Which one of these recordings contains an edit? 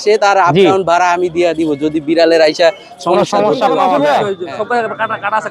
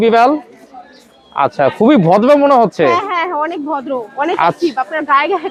first; 1 cut; at 3.9 s

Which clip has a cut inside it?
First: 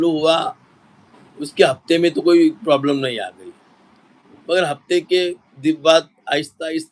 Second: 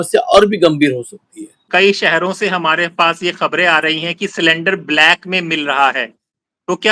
second; 1 cut; at 1.6 s

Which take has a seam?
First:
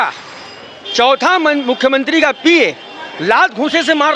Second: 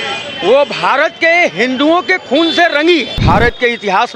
second; 1 cut; at 3.1 s

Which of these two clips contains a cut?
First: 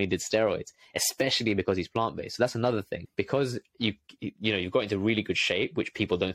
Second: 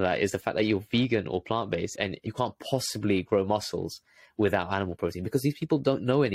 second; 1 cut; at 2.1 s

